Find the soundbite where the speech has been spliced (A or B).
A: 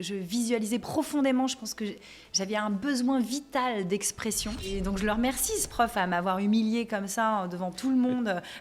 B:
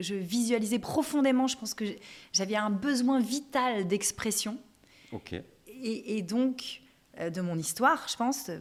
A